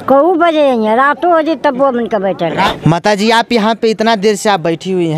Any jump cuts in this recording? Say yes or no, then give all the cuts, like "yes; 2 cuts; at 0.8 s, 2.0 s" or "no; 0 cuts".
yes; 1 cut; at 2.7 s